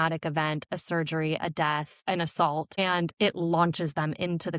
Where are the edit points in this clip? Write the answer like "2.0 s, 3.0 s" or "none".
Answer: 1.9 s, 2.8 s

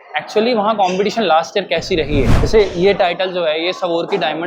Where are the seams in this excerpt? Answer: 2.4 s

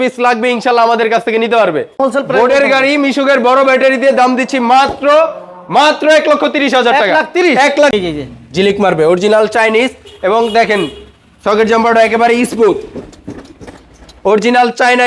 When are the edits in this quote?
1.9 s, 7.9 s

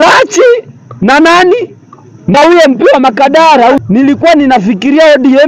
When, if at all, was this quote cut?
3.8 s

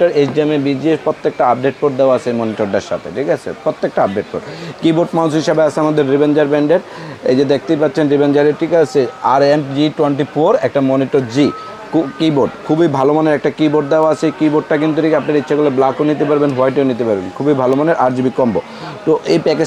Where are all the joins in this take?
none

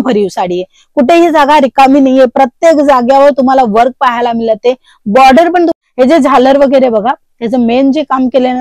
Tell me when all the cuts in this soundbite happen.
5.7 s

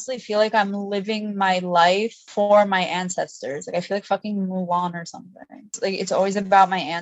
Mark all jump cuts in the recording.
2.2 s, 5.7 s

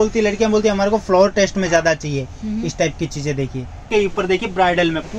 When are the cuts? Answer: 3.8 s

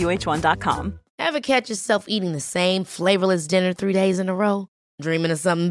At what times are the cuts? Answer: 1.0 s

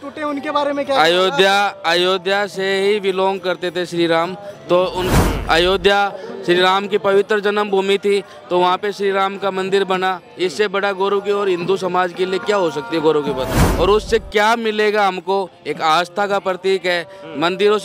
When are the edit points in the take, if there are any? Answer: 5.1 s, 13.6 s

